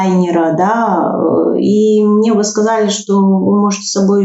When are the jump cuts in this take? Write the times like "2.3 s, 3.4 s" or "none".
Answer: none